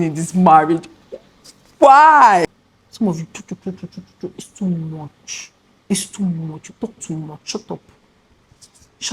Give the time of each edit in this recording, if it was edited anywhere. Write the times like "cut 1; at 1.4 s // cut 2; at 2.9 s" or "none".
cut 1; at 2.5 s